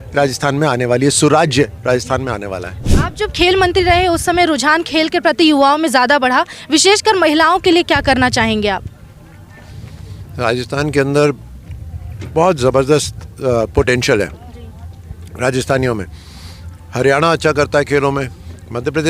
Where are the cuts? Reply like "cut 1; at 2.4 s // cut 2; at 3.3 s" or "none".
cut 1; at 2.7 s